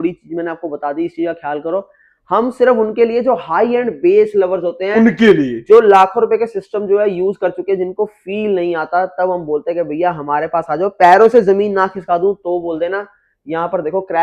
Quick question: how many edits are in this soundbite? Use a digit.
0